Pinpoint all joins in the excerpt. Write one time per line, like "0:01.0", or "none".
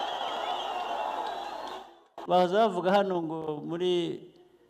0:02.2